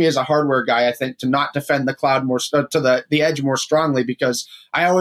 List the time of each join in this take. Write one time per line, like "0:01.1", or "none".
none